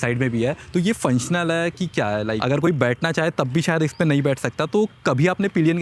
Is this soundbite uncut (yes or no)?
no